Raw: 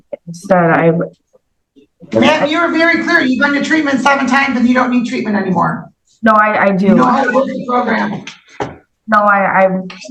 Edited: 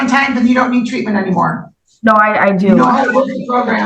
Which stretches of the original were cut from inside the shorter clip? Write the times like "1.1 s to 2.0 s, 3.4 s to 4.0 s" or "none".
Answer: none